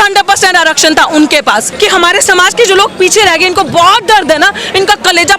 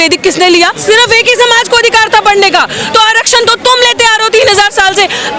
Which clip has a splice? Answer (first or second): first